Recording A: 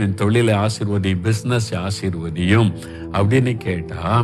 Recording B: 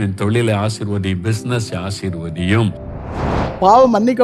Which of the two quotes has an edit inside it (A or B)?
B